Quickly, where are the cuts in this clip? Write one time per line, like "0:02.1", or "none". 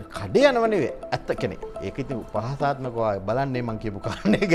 none